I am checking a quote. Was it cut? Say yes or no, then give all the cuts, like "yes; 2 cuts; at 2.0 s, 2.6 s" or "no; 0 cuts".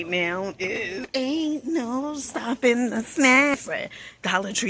yes; 2 cuts; at 1.0 s, 3.6 s